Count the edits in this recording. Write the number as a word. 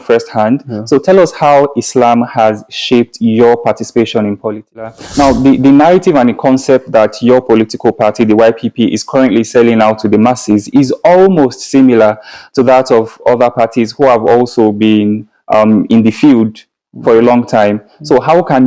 one